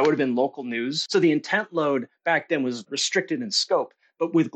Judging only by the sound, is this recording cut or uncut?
cut